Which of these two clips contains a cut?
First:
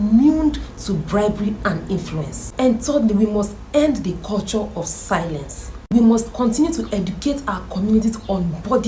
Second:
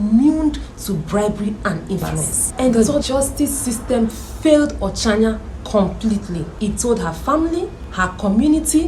second; 3 cuts; at 2.7 s, 6.5 s, 7.8 s

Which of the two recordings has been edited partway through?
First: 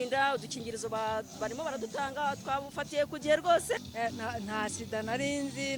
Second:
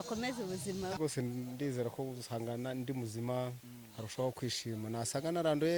first; 1 cut; at 3.9 s

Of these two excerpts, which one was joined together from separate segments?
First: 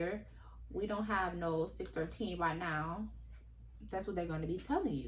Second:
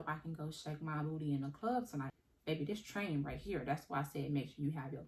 second; 1 cut; at 2.1 s

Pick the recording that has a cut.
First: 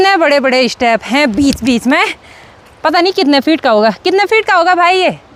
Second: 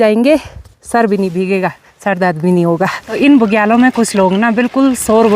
second; 1 cut; at 3.2 s

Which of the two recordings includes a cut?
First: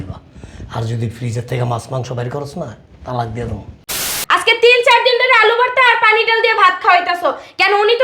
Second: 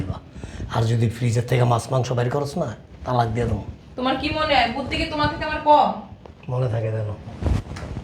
first; 1 cut; at 4.1 s

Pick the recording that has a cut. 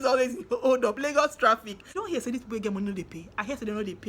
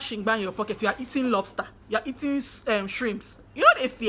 first; 1 cut; at 2.0 s

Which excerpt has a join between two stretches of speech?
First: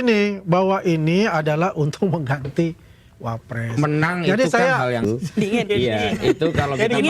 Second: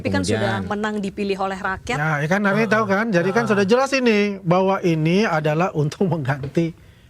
first; 1 cut; at 5.0 s

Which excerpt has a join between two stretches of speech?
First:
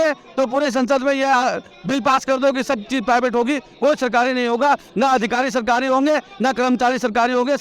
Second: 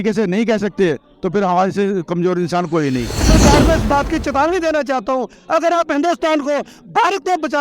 second; 1 cut; at 3.3 s

